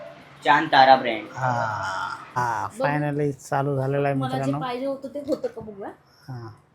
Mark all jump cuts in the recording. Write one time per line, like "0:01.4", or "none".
0:02.4